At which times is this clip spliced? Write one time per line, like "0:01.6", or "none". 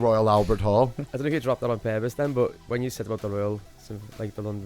0:01.0

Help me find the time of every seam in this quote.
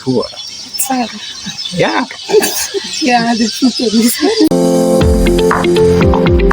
0:04.5

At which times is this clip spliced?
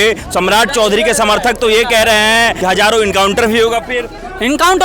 0:02.6

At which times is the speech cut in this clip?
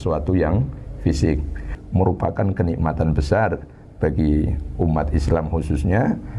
0:01.8

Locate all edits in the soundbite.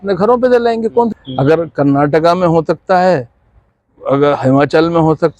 0:01.1

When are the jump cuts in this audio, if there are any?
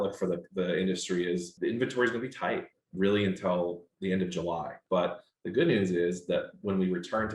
0:01.5
0:02.8
0:04.8

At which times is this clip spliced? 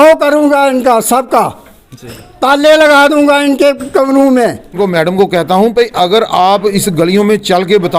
0:04.8

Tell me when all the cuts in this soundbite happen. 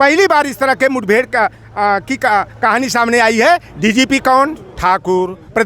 0:03.7

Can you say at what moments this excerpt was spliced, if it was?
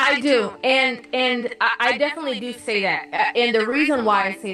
0:01.6

